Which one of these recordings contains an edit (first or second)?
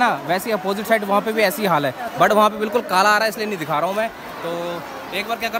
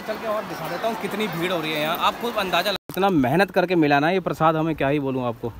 second